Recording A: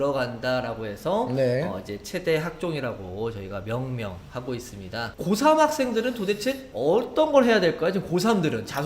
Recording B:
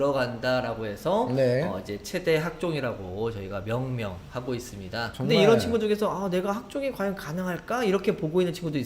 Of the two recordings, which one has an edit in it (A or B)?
B